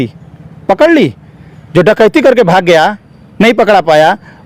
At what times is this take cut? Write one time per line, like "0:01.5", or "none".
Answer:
none